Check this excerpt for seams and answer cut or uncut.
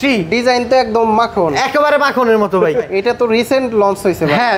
cut